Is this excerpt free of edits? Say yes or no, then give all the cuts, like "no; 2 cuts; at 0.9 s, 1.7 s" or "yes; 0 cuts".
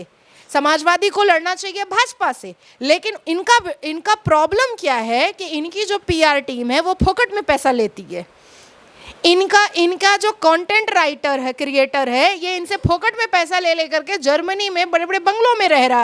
yes; 0 cuts